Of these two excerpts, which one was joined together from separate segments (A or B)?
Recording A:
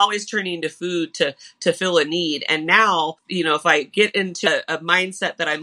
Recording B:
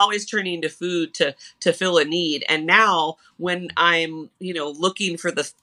A